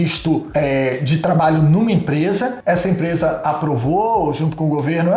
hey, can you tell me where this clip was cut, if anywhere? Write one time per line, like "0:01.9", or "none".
none